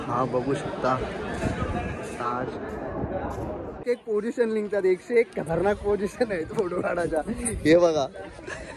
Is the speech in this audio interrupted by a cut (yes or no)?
yes